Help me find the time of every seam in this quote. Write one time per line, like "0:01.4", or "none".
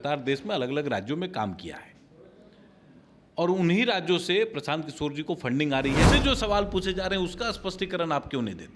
0:06.1